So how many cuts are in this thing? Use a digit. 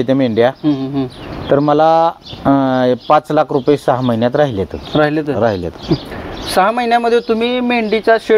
0